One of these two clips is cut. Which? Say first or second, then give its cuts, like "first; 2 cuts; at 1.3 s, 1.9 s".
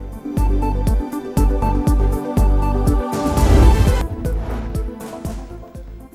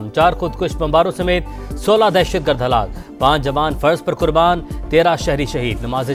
first; 1 cut; at 4.0 s